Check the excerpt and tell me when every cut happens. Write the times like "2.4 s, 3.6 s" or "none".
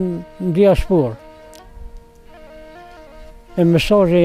none